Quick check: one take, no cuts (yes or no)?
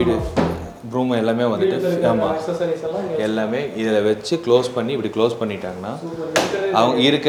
yes